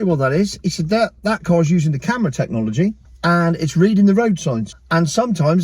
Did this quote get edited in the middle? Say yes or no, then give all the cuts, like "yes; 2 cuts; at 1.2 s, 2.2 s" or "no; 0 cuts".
yes; 2 cuts; at 3.1 s, 4.7 s